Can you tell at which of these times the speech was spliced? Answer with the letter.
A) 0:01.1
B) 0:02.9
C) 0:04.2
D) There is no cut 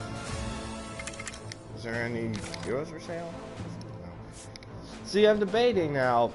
A